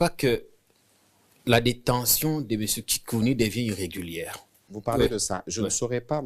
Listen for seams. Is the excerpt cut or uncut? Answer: cut